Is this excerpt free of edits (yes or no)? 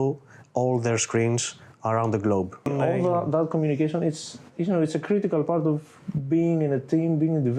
no